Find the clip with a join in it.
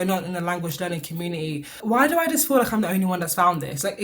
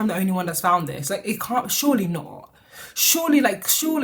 first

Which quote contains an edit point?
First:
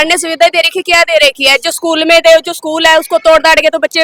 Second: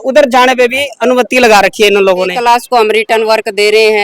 second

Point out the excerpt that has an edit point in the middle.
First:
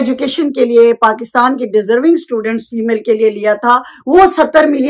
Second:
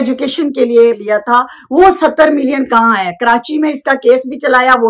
second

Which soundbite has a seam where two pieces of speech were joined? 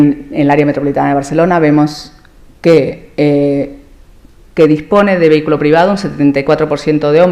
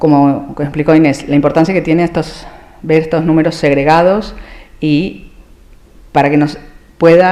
first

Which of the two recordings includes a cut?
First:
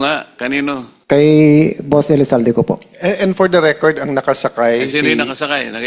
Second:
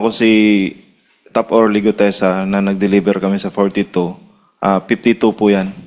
first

